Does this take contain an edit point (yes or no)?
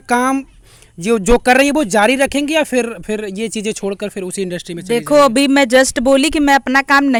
no